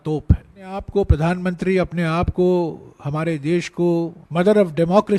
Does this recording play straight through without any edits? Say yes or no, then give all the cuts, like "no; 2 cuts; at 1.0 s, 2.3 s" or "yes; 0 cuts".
no; 2 cuts; at 0.9 s, 4.2 s